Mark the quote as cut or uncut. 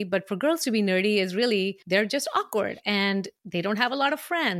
cut